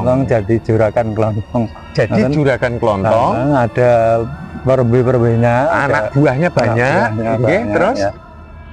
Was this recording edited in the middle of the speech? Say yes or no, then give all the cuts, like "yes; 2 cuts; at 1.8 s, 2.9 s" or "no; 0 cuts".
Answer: no; 0 cuts